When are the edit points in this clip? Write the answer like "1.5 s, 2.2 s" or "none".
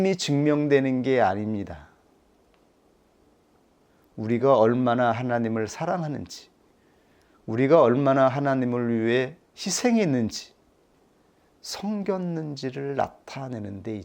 none